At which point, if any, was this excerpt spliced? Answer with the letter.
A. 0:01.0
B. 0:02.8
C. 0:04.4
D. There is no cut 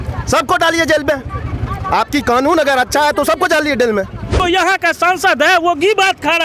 C